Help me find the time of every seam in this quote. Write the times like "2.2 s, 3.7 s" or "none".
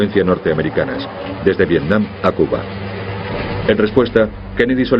1.6 s

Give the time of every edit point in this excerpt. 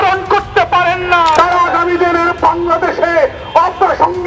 1.3 s

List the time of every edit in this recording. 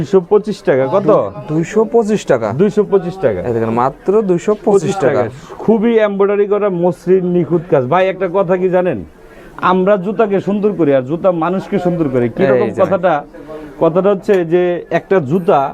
none

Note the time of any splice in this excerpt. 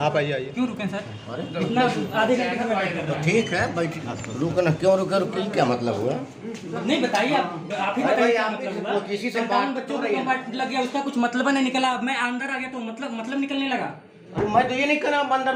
none

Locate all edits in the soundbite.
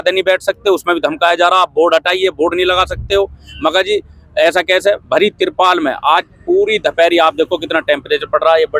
none

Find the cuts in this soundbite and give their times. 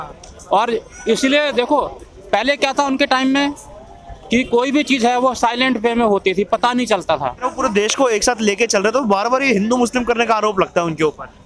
7.4 s

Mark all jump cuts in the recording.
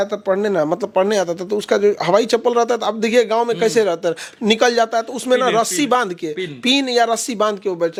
none

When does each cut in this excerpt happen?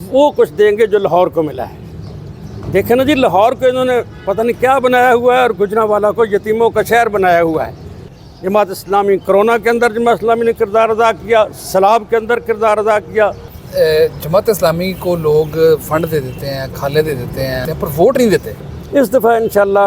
8.1 s, 13.4 s, 17.7 s

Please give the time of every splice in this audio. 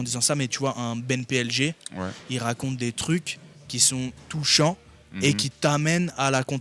none

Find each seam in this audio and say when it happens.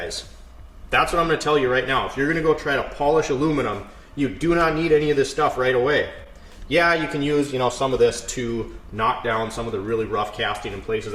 none

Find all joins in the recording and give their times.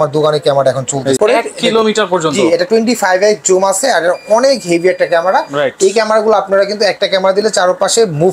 1.2 s

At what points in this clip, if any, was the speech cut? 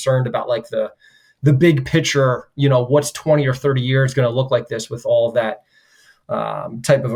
none

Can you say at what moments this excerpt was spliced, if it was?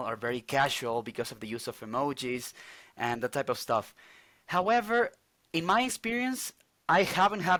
none

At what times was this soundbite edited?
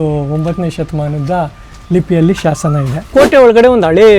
3.1 s

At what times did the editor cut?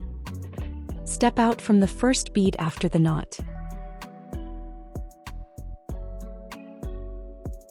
1.2 s, 3.3 s

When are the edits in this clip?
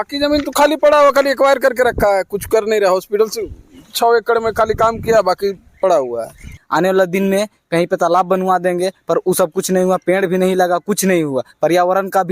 6.5 s

